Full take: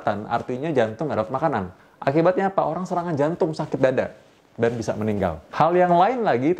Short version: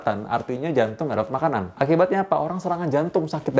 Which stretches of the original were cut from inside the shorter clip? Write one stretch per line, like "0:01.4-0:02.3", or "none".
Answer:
0:01.7-0:01.9